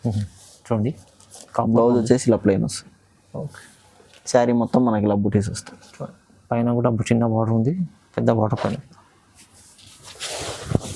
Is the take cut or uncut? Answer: uncut